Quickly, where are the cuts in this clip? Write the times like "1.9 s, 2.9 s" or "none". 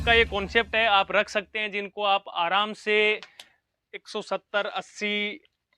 none